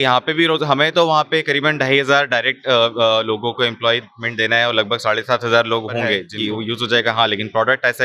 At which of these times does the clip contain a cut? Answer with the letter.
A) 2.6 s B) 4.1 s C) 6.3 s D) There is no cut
C